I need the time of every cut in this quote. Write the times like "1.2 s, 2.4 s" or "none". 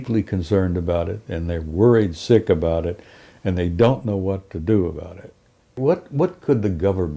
5.7 s